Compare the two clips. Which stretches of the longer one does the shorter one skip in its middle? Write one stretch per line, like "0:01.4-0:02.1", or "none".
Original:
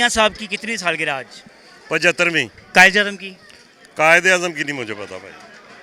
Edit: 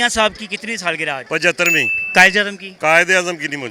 0:01.2-0:01.8
0:03.2-0:03.8

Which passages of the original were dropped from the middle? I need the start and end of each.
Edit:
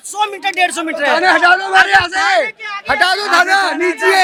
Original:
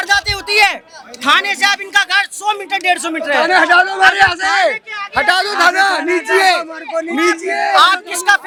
none

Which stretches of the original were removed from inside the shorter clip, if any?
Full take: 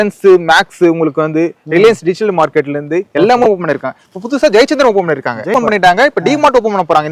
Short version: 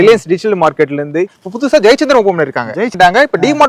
0:03.1-0:04.0
0:05.6-0:05.7

